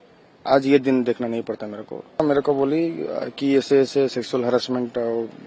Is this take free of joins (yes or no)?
no